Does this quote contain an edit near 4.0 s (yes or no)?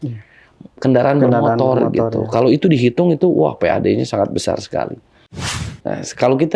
no